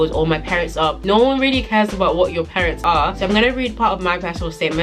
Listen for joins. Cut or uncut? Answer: cut